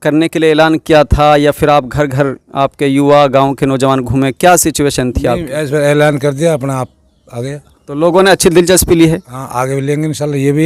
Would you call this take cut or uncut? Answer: uncut